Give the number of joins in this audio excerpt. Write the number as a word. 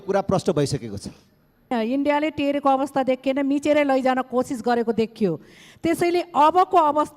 one